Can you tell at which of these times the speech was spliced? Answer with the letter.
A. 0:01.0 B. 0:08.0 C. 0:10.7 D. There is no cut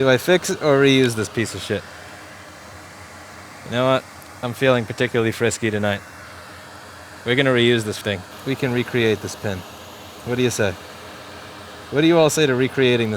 B